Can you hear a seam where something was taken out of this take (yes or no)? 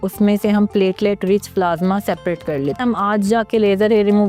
yes